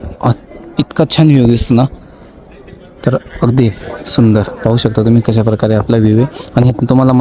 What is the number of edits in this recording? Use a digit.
0